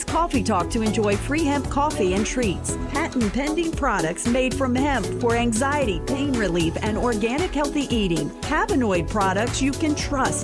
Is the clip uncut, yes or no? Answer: yes